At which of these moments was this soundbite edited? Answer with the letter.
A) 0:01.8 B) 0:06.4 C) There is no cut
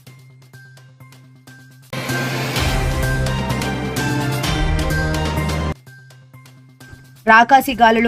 A